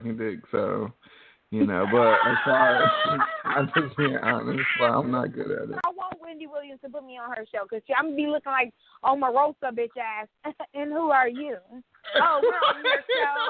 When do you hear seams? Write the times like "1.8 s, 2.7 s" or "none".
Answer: 5.8 s